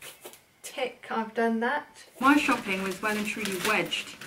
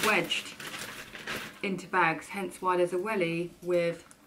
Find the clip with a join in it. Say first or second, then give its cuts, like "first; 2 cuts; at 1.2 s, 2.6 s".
first; 1 cut; at 2.0 s